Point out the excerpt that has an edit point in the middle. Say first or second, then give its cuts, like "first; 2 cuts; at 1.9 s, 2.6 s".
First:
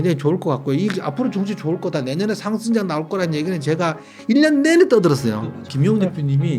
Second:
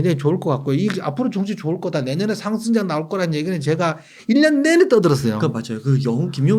first; 1 cut; at 5.6 s